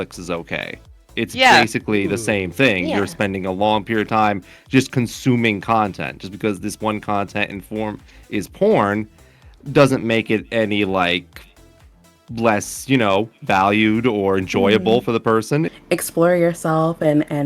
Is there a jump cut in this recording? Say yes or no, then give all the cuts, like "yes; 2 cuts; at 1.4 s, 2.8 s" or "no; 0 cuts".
yes; 1 cut; at 15.7 s